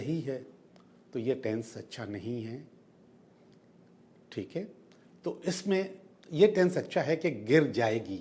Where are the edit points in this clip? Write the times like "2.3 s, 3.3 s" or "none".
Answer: none